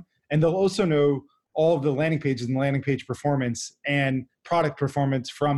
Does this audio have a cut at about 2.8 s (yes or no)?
no